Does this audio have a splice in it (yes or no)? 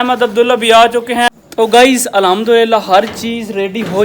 yes